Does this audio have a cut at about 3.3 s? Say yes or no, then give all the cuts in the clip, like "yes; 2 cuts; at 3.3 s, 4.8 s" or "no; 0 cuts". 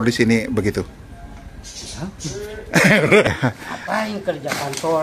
yes; 1 cut; at 3.3 s